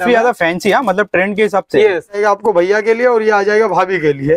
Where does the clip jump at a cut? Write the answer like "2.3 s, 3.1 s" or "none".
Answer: 2.2 s